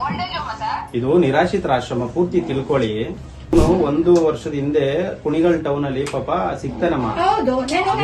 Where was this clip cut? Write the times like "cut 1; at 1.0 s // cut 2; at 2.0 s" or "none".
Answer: cut 1; at 3.5 s